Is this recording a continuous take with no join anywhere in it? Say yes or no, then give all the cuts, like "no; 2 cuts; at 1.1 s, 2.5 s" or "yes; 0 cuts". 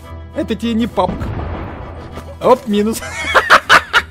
yes; 0 cuts